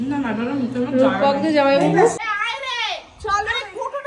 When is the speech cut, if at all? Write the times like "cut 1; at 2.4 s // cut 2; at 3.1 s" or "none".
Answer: cut 1; at 2.2 s